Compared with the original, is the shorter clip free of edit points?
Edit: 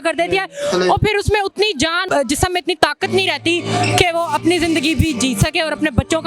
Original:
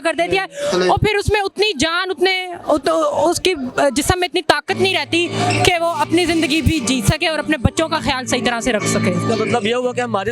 no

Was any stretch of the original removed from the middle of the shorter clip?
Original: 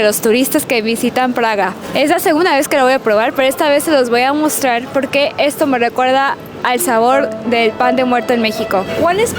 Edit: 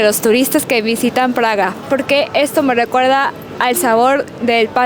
yes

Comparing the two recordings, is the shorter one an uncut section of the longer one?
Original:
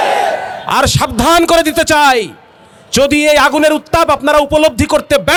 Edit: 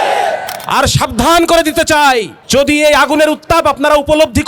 no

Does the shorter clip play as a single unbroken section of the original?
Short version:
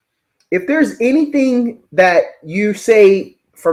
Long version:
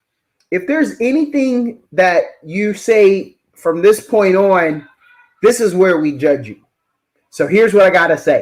yes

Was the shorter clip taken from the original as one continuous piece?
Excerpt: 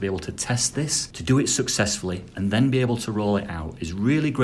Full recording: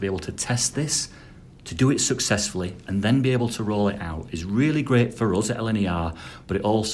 no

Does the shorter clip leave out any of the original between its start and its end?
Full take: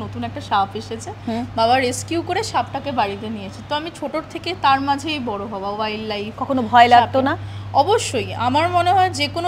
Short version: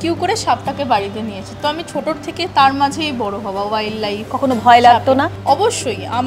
yes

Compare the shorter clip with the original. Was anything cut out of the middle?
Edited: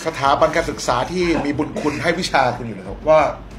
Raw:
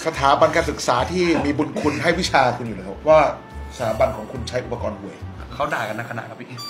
no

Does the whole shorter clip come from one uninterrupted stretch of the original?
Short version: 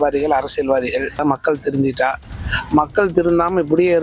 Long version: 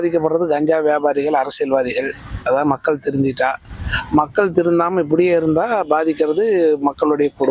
no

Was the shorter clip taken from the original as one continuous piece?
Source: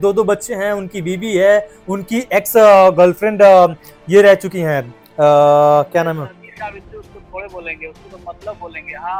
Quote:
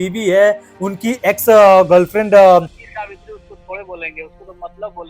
no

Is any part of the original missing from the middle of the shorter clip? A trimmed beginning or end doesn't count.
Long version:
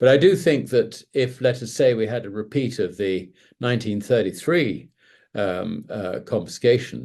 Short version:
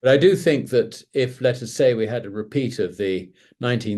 no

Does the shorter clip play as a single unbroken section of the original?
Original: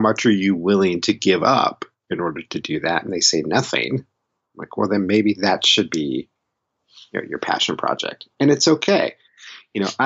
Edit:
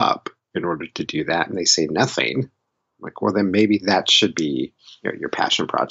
no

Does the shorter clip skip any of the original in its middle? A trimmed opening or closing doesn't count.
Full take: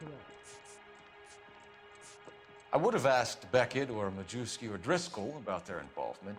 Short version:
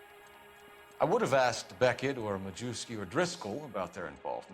yes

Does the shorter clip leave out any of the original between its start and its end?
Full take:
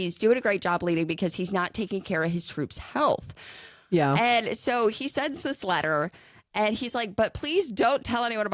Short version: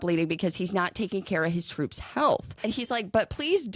yes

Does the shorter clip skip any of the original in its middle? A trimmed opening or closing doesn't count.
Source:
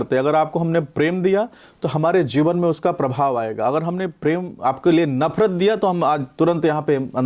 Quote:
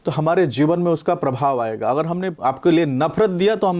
yes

